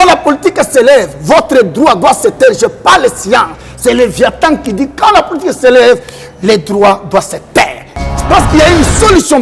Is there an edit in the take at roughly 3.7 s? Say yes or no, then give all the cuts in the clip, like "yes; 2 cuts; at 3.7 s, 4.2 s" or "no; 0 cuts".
no; 1 cut; at 8.1 s